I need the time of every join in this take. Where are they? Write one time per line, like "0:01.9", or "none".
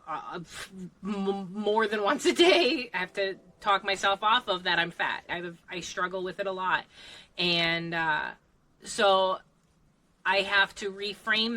0:02.9
0:05.3